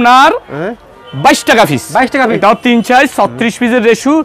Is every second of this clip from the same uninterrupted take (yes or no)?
no